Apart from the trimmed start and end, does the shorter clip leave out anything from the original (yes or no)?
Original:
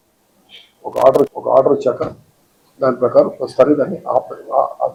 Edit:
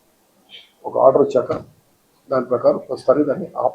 yes